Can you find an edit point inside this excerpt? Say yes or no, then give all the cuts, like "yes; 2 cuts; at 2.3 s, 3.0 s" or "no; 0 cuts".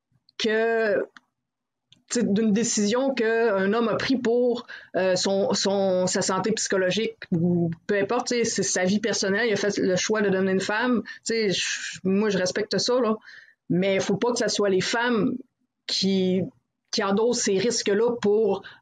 no; 0 cuts